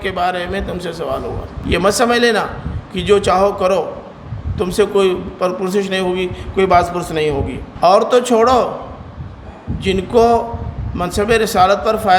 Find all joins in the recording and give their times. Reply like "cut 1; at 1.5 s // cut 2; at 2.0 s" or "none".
cut 1; at 1.5 s // cut 2; at 7.6 s